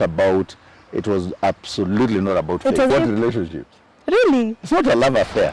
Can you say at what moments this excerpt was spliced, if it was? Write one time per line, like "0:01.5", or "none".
0:02.9